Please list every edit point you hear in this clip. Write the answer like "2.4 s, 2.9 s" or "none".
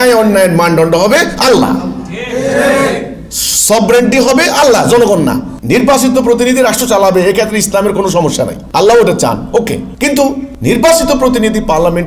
5.5 s, 8.6 s, 10.1 s